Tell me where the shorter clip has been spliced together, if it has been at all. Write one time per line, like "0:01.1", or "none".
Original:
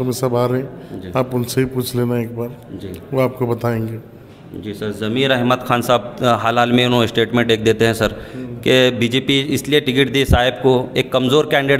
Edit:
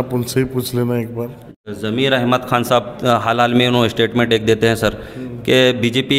0:01.6

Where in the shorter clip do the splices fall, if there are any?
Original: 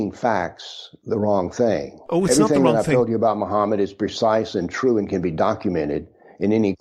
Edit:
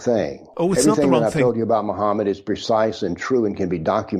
none

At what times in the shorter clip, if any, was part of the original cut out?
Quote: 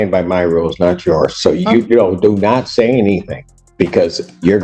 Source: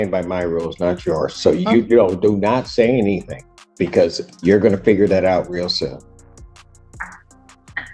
none

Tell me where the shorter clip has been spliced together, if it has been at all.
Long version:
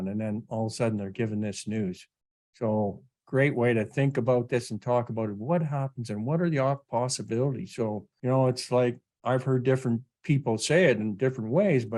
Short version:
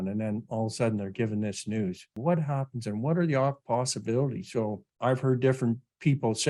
0:02.1
0:04.9

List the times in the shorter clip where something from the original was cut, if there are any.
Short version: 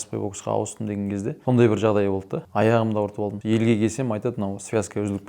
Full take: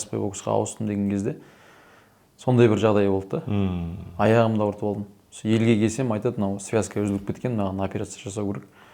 0:01.4
0:02.4
0:03.4

